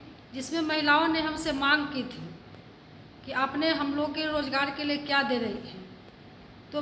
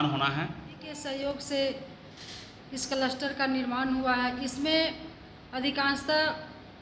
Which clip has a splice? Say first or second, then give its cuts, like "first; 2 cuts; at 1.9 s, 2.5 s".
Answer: second; 1 cut; at 0.9 s